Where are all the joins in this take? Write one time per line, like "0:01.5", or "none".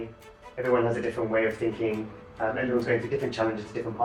none